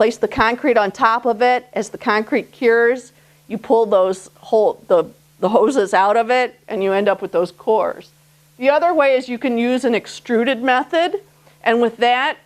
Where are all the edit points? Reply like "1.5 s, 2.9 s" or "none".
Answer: 10.9 s